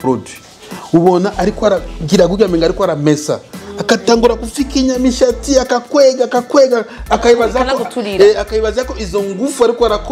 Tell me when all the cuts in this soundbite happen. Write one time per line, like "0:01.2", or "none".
none